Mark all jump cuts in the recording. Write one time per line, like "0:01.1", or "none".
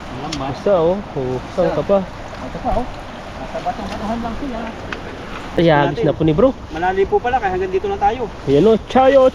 0:05.5